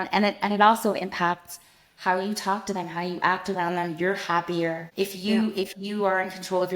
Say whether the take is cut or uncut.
cut